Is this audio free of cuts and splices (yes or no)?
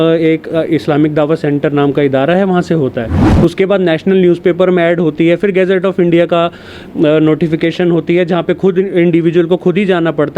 no